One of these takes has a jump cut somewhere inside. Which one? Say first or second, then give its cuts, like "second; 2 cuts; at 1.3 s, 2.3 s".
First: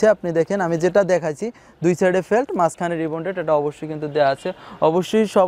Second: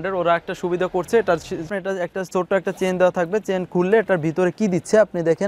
second; 1 cut; at 1.7 s